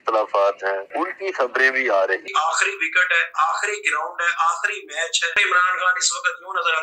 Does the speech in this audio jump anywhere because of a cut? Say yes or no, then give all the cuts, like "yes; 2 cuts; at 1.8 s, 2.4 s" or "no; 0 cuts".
yes; 3 cuts; at 0.9 s, 2.2 s, 5.4 s